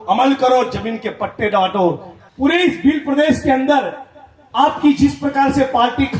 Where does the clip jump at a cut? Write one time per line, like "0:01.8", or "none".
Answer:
0:02.1